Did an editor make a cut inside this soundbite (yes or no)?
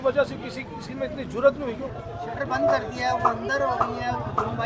yes